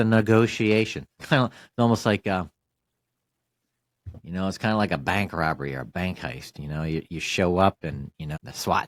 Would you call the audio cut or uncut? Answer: uncut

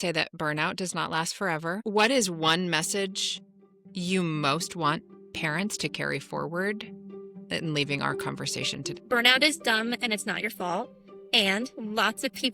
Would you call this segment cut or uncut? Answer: cut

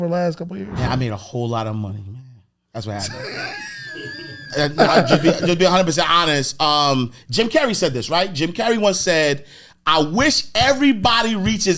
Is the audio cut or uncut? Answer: uncut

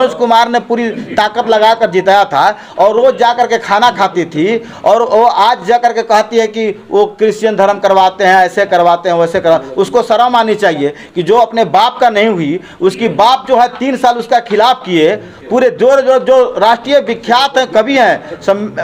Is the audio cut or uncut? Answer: uncut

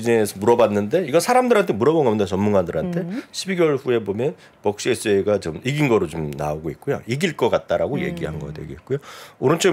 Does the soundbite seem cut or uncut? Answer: uncut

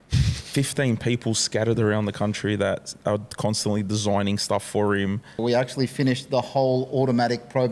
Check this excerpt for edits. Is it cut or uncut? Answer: cut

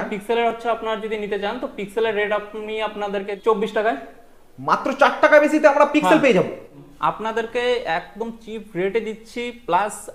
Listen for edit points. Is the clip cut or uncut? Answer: cut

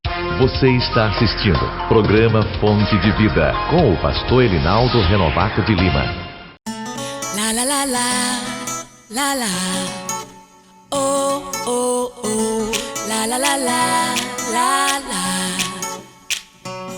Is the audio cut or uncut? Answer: cut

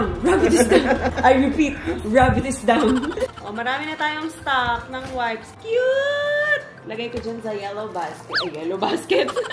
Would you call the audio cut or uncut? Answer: cut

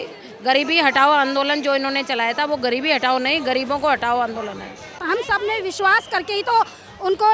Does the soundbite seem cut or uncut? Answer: cut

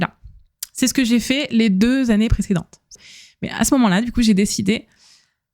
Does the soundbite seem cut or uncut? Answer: cut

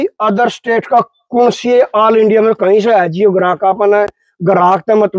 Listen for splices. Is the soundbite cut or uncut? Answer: uncut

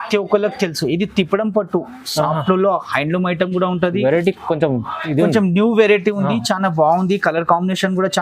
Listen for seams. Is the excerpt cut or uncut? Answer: uncut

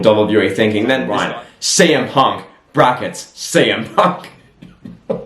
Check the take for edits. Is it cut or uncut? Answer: cut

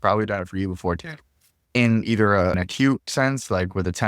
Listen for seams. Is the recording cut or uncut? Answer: cut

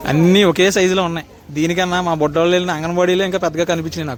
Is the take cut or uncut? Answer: uncut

